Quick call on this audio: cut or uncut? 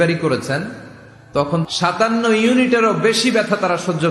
cut